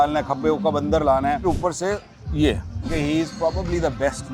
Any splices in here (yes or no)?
yes